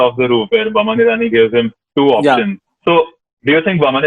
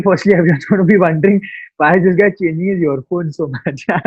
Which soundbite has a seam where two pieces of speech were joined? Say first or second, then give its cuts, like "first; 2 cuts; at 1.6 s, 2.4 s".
first; 1 cut; at 2.6 s